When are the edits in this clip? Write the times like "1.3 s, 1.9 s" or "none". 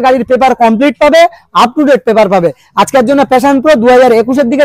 none